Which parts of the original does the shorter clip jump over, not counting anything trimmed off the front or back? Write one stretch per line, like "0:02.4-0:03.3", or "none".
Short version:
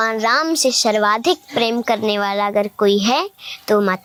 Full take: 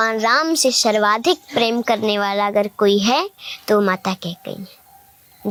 none